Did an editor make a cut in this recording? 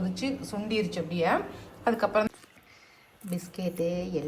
yes; 1 cut; at 2.3 s

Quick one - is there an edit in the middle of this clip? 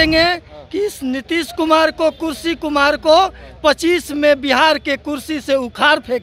no; 0 cuts

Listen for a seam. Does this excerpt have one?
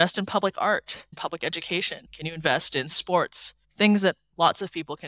yes; 3 cuts; at 1.1 s, 2.0 s, 4.3 s

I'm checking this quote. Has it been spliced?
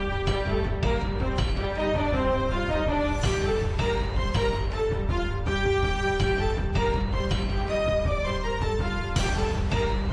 no; 0 cuts

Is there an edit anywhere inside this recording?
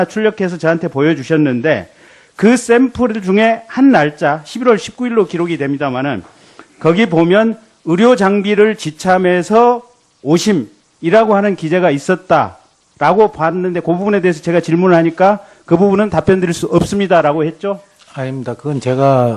no; 0 cuts

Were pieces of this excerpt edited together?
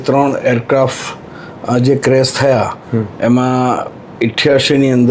no; 0 cuts

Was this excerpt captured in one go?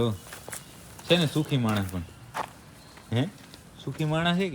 yes; 0 cuts

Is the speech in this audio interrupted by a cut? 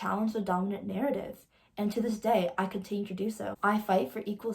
yes; 1 cut; at 3.5 s

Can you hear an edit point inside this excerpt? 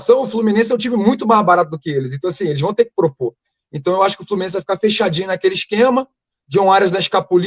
no; 0 cuts

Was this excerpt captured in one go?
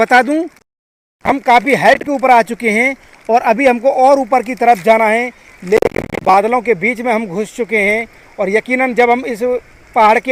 yes; 0 cuts

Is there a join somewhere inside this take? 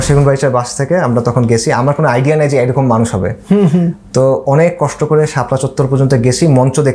no; 0 cuts

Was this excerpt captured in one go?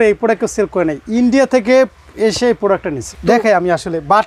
no; 1 cut; at 3.1 s

